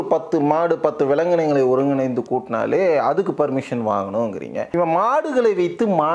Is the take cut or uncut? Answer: cut